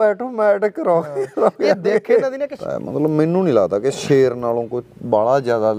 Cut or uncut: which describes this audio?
cut